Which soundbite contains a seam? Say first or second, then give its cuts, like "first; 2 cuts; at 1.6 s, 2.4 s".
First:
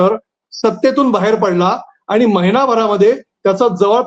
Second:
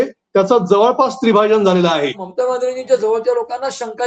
second; 1 cut; at 2.2 s